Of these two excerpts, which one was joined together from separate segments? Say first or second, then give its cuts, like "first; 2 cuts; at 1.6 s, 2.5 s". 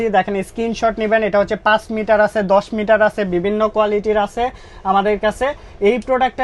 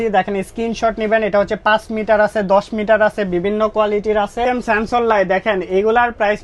second; 1 cut; at 4.4 s